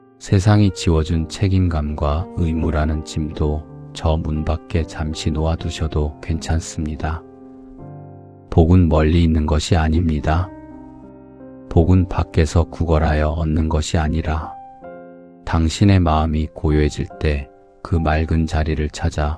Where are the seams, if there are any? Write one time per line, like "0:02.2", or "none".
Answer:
none